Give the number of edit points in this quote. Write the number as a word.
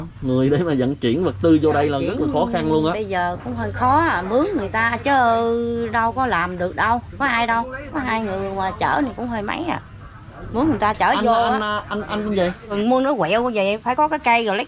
one